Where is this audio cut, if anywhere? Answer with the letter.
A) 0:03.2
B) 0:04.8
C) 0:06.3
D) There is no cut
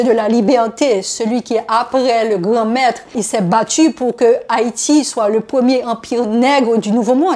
A